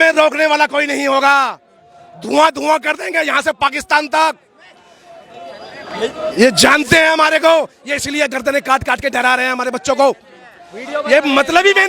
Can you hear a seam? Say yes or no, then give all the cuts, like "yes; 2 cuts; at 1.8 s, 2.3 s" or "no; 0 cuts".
no; 0 cuts